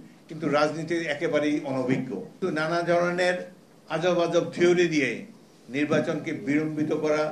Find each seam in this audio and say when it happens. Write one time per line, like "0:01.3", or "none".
0:02.4